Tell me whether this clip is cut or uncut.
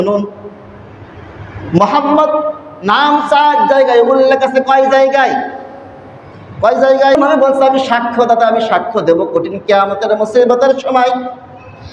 cut